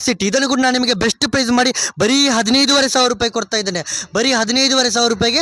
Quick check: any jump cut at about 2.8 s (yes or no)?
no